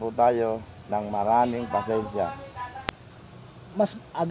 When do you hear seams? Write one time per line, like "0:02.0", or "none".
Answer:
0:02.9